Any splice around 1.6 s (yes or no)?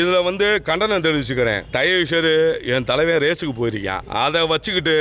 yes